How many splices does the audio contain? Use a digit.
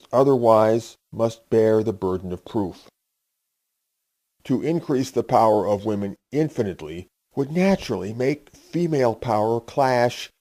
0